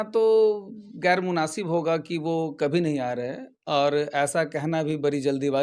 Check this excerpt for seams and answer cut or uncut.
uncut